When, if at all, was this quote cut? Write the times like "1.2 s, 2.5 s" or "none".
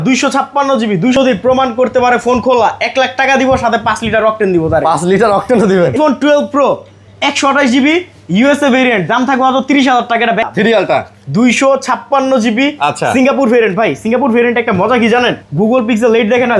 1.2 s, 5.9 s, 10.5 s, 15.4 s